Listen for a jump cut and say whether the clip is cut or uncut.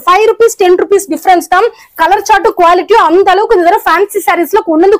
uncut